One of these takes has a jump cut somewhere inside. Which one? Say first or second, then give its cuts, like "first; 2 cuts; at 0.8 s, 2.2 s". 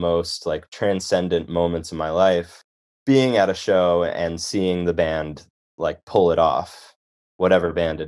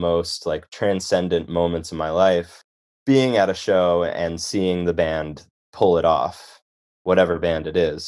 second; 1 cut; at 5.7 s